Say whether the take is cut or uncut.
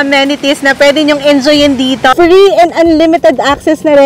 cut